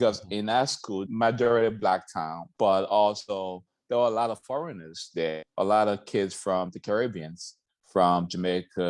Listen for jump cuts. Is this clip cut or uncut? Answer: cut